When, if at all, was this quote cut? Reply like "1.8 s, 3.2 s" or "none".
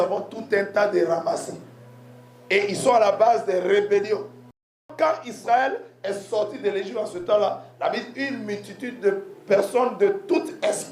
4.9 s